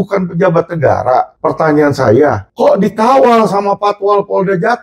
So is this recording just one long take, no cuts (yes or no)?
no